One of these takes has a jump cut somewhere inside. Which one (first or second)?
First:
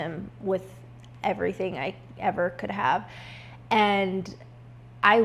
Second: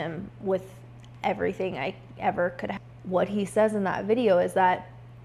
second